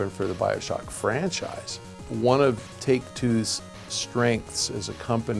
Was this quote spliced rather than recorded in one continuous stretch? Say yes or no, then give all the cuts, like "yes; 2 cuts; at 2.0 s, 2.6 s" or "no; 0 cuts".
yes; 1 cut; at 2.0 s